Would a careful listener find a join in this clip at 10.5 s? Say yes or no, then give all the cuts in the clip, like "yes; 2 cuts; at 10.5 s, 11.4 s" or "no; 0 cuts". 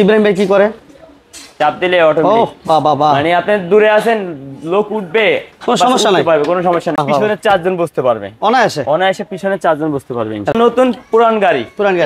yes; 2 cuts; at 7.0 s, 10.5 s